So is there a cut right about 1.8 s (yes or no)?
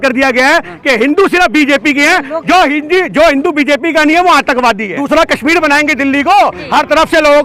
no